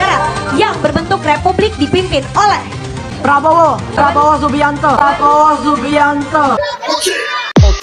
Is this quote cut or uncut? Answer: uncut